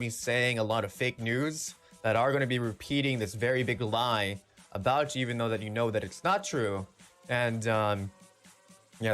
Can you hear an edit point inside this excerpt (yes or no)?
no